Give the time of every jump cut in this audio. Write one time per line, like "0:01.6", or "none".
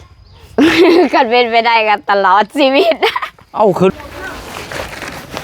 0:03.9

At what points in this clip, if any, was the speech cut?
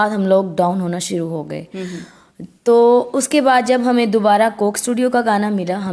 none

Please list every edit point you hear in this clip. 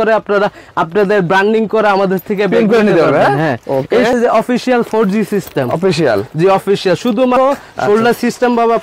0:04.1
0:07.4

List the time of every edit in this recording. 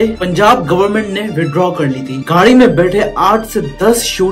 0:02.1

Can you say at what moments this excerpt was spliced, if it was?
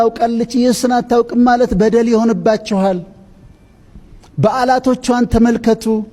none

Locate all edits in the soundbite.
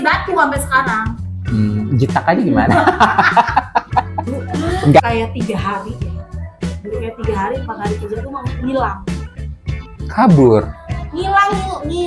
0:05.0

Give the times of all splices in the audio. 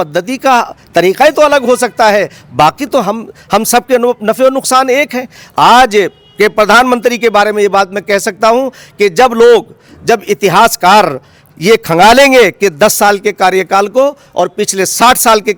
none

